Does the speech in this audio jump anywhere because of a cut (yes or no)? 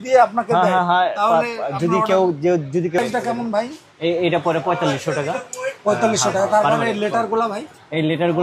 yes